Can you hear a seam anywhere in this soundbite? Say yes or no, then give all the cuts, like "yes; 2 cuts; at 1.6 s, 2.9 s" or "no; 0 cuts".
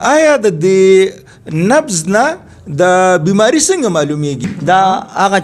yes; 1 cut; at 4.4 s